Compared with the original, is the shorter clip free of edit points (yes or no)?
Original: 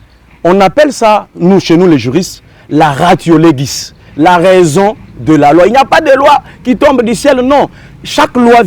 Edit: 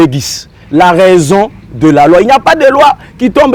yes